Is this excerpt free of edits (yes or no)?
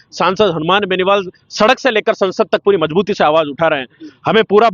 yes